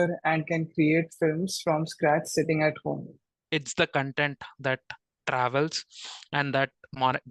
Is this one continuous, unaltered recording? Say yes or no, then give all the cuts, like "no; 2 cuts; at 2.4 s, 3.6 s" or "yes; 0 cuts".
no; 1 cut; at 3.4 s